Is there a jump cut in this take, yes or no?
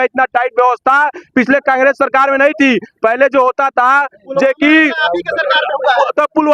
no